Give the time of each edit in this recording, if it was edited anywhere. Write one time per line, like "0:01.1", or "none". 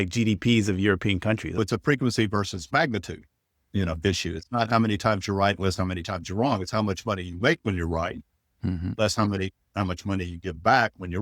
0:01.6

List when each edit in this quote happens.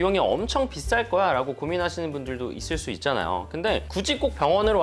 0:03.9

